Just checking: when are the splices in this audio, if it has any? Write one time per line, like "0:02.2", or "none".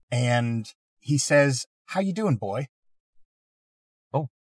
none